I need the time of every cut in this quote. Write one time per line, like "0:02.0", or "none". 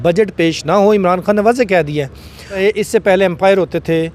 0:02.6